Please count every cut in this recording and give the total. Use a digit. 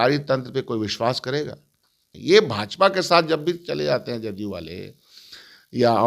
1